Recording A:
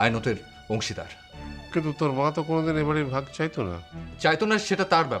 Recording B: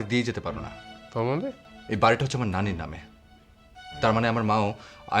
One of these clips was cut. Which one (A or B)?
B